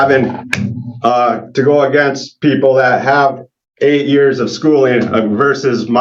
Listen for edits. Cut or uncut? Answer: uncut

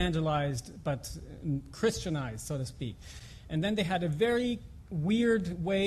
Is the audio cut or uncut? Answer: cut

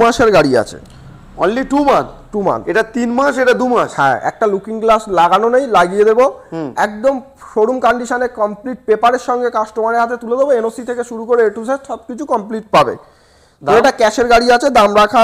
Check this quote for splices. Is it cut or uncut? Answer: uncut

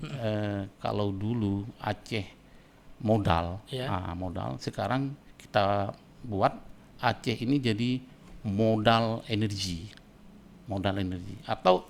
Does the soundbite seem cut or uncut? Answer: uncut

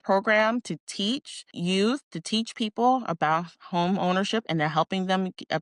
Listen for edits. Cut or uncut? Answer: uncut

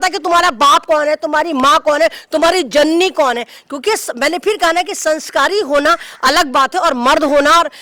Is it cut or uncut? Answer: uncut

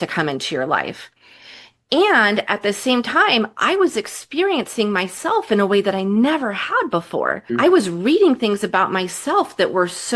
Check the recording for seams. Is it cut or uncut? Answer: cut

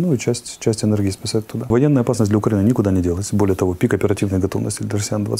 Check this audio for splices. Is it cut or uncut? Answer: cut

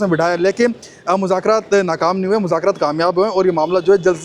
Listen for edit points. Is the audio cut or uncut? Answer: uncut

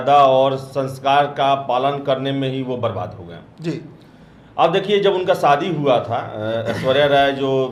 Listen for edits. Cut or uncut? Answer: uncut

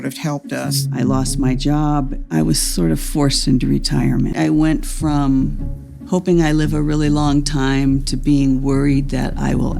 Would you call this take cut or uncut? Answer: uncut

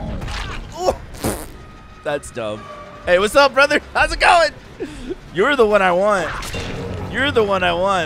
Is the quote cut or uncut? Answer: uncut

